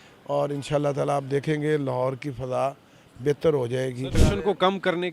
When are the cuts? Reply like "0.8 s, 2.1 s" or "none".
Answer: 4.2 s